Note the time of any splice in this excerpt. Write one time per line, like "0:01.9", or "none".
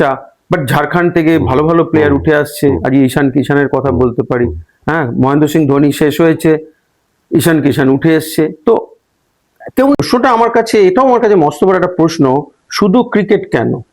0:10.0